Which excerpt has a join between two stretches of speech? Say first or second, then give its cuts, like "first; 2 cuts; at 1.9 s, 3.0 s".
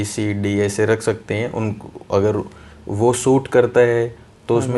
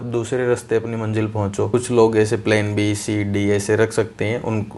second; 1 cut; at 1.7 s